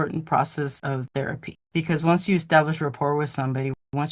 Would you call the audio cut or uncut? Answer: uncut